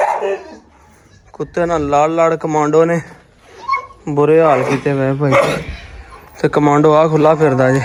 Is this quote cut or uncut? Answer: uncut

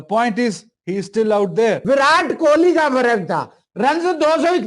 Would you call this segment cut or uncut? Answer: cut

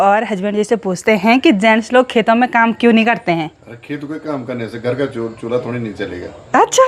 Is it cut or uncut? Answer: uncut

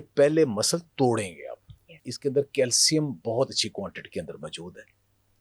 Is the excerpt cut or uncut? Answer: cut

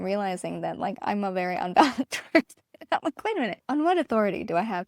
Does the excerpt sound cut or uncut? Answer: cut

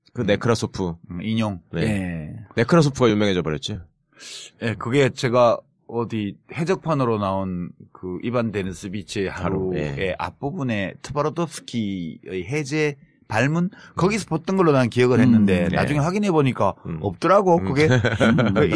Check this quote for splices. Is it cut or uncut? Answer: uncut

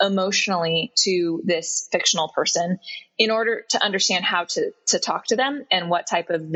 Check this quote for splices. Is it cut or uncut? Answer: uncut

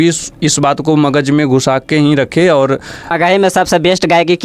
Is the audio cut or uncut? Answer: cut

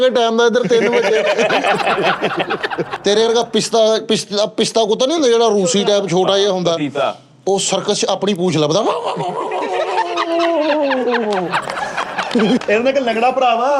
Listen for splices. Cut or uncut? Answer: cut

